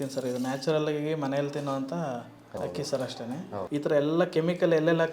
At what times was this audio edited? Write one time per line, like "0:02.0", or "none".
0:02.6
0:03.6